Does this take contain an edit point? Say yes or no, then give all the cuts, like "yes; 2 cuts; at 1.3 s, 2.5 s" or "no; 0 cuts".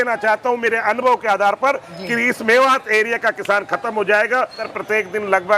yes; 1 cut; at 4.7 s